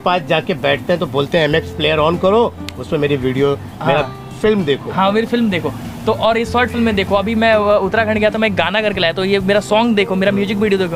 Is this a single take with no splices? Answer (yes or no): yes